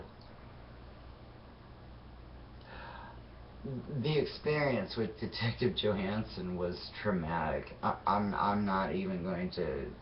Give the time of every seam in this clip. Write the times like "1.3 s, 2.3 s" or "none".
8.4 s